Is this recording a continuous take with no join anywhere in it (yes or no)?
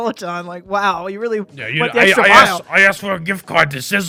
yes